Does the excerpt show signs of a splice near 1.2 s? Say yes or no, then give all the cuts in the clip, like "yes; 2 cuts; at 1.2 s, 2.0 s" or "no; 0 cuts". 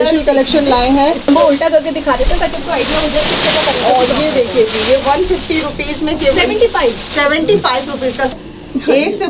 yes; 2 cuts; at 1.2 s, 8.3 s